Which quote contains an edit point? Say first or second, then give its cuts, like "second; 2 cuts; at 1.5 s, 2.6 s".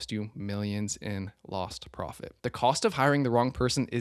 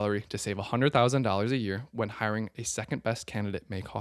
first; 1 cut; at 2.3 s